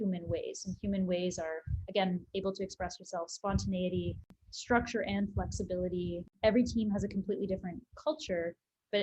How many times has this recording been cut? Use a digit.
2